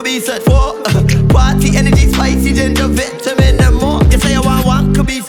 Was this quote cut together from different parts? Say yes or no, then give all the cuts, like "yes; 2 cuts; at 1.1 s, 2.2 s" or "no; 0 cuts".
no; 0 cuts